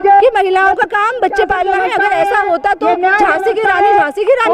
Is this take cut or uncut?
uncut